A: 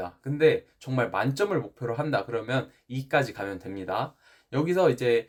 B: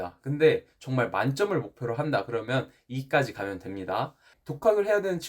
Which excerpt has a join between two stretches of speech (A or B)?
B